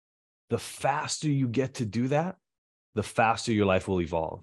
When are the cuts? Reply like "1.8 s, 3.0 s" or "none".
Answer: none